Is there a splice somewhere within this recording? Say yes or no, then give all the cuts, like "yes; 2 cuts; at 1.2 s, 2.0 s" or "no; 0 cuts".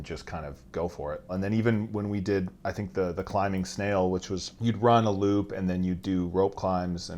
yes; 2 cuts; at 1.3 s, 4.5 s